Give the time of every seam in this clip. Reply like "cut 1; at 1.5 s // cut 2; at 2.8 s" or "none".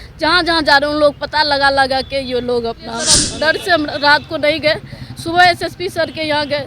cut 1; at 3.2 s

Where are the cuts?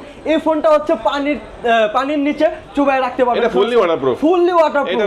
none

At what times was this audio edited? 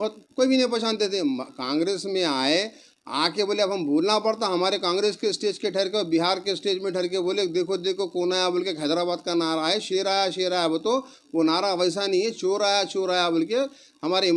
none

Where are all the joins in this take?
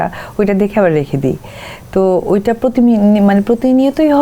none

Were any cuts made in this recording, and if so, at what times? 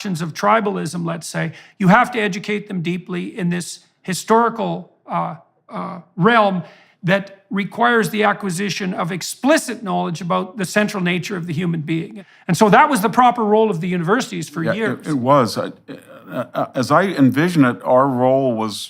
cut 1; at 12.1 s

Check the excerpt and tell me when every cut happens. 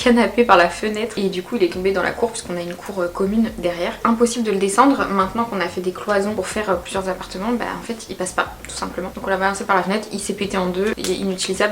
none

